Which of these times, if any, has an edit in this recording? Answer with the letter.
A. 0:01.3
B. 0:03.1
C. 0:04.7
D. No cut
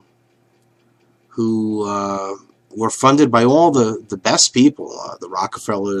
D